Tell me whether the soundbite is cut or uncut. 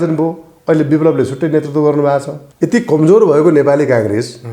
cut